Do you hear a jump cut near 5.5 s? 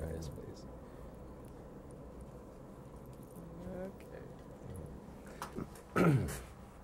yes; 1 cut; at 5.5 s

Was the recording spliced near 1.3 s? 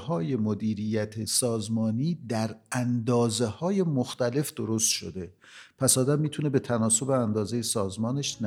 yes; 1 cut; at 1.3 s

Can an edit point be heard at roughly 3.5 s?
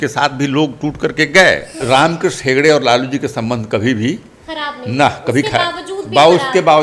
no; 1 cut; at 1.8 s

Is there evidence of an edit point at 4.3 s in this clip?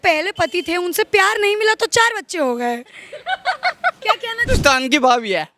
yes; 1 cut; at 4.3 s

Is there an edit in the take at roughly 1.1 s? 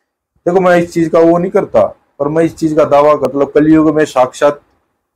no; 1 cut; at 3.2 s

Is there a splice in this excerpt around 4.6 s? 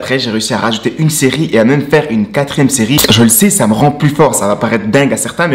no; 1 cut; at 3.0 s

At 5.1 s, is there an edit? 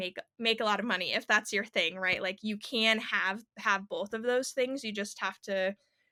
no; 0 cuts

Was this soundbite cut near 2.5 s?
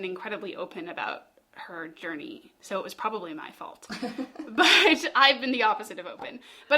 yes; 1 cut; at 2.5 s

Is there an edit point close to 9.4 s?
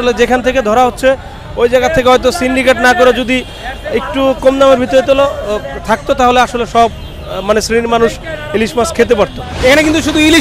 yes; 1 cut; at 9.4 s

